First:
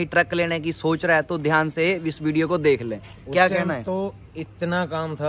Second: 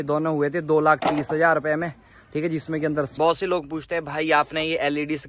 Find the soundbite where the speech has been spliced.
second; 1 cut; at 3.1 s

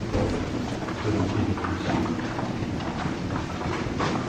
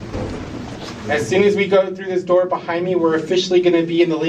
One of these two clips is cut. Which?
second; 1 cut; at 0.9 s

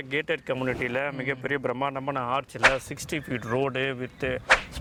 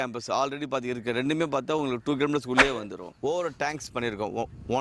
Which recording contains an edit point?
second; 1 cut; at 3.0 s

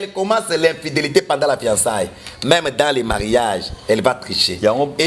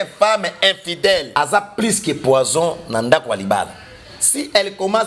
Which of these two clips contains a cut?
second; 1 cut; at 1.4 s

